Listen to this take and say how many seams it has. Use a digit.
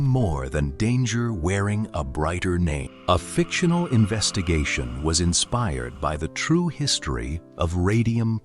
1